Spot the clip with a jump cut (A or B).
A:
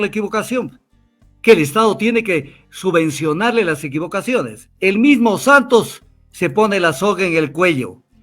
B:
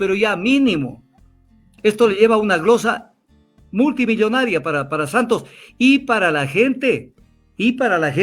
A